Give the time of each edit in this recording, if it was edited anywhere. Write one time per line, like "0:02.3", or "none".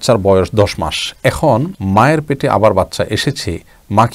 0:01.8